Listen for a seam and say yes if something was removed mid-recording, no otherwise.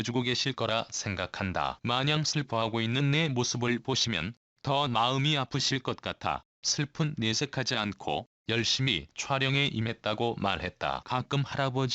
yes